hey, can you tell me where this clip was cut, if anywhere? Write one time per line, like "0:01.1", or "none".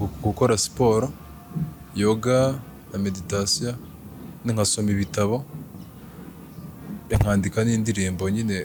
none